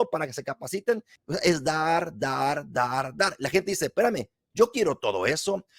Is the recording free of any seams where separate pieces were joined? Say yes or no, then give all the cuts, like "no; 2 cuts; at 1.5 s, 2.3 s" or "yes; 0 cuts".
no; 1 cut; at 1.1 s